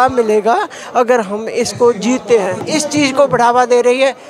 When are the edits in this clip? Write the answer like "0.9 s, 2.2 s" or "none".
2.6 s

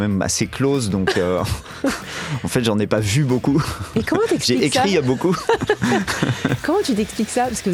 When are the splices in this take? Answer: none

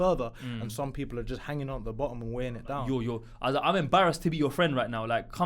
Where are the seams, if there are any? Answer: 2.8 s

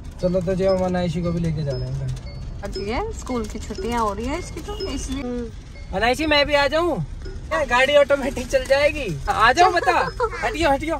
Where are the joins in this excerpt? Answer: 2.7 s, 5.2 s, 7.5 s, 9.3 s

